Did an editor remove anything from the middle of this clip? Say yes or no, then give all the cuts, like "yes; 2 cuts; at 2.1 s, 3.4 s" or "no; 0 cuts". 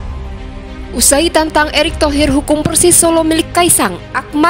yes; 1 cut; at 0.9 s